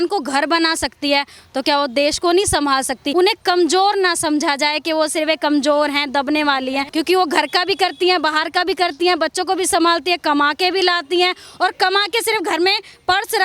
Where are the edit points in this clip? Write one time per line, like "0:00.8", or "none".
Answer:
0:03.0
0:06.9